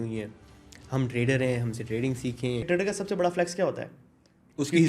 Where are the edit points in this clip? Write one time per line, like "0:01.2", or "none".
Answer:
0:02.7